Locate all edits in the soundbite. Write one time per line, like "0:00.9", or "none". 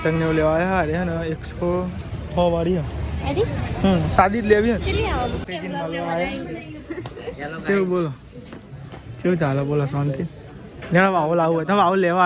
0:05.4